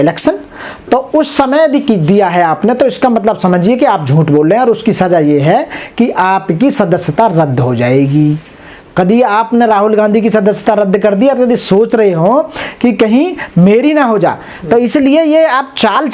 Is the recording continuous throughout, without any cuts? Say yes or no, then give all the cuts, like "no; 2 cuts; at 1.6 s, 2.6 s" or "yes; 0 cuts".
yes; 0 cuts